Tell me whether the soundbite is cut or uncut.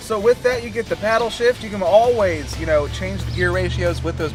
uncut